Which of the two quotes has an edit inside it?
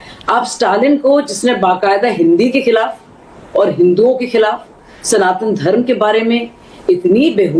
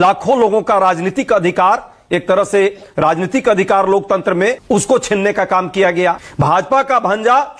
second; 2 cuts; at 4.6 s, 6.3 s

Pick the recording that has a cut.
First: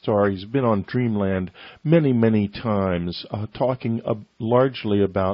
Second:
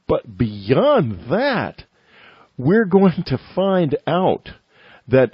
second; 1 cut; at 2.9 s

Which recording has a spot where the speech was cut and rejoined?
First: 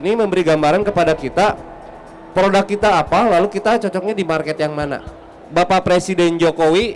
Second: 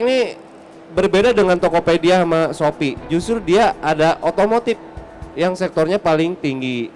first; 1 cut; at 5.4 s

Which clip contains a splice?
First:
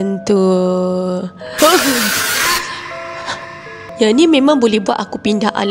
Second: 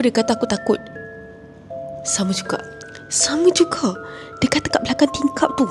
first; 1 cut; at 3.9 s

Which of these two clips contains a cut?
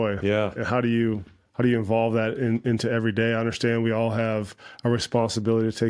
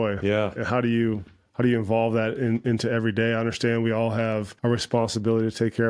second; 1 cut; at 4.5 s

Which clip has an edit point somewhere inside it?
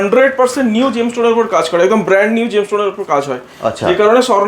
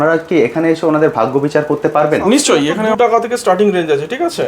second; 1 cut; at 2.9 s

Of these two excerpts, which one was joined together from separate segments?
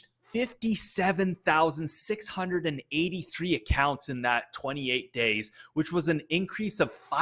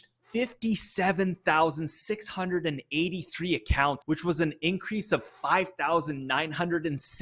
second; 1 cut; at 4.0 s

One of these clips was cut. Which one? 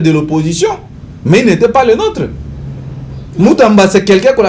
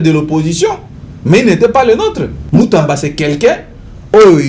second; 1 cut; at 2.3 s

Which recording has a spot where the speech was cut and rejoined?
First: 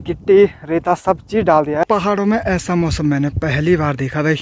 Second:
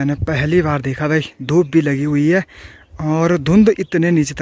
first; 1 cut; at 1.9 s

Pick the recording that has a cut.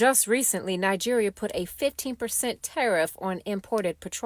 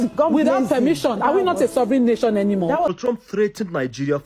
second; 1 cut; at 3.0 s

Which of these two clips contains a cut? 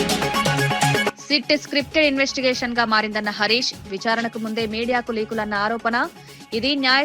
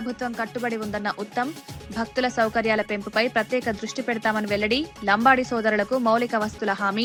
first; 1 cut; at 1.1 s

